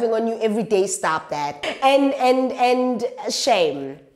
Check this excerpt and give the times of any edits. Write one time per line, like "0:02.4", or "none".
0:01.7